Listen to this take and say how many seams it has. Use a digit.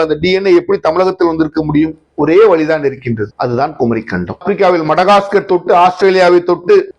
1